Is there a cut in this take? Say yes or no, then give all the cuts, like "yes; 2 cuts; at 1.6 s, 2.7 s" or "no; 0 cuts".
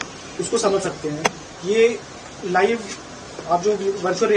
no; 0 cuts